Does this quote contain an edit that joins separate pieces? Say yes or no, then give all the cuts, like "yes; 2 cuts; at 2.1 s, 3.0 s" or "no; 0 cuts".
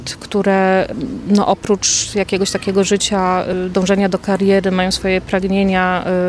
yes; 2 cuts; at 0.9 s, 3.5 s